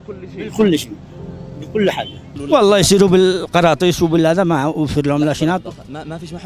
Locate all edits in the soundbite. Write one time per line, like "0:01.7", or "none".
0:02.3